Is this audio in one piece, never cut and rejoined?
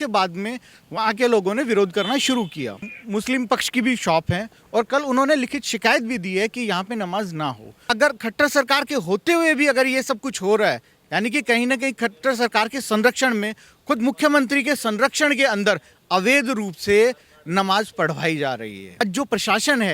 no; 3 cuts; at 2.9 s, 7.9 s, 19.0 s

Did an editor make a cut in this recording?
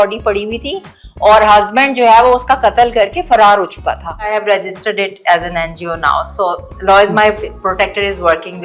yes; 1 cut; at 4.4 s

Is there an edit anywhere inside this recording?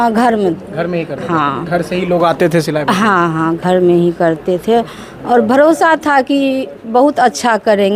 no; 0 cuts

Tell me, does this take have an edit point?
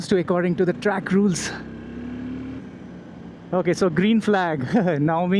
yes; 1 cut; at 2.6 s

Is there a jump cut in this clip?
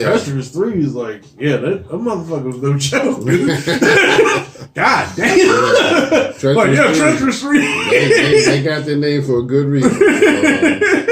no; 0 cuts

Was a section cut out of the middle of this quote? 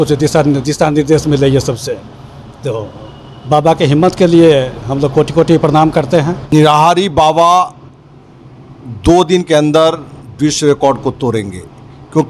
yes; 1 cut; at 6.5 s

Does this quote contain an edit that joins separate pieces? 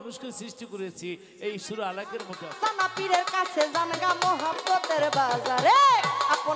yes; 1 cut; at 2.4 s

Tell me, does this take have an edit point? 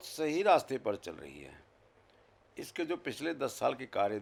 no; 0 cuts

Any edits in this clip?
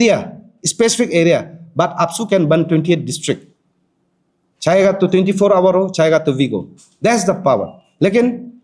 no; 0 cuts

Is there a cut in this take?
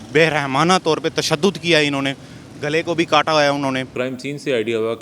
yes; 1 cut; at 3.9 s

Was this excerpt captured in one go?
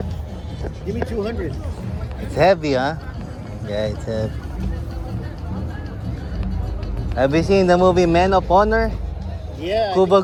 yes; 0 cuts

